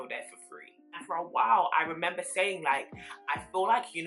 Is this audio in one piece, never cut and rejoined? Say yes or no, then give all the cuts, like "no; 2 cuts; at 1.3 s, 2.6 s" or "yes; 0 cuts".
no; 1 cut; at 1.0 s